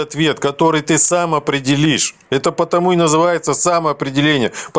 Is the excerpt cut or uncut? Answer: uncut